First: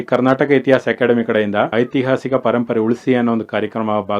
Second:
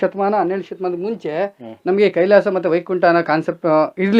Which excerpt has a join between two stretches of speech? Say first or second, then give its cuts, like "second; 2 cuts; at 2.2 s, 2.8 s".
first; 1 cut; at 1.7 s